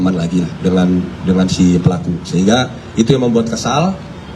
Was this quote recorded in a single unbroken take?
yes; 0 cuts

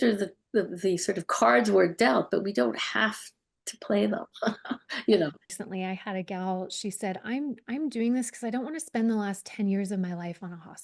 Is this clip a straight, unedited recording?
no; 1 cut; at 5.5 s

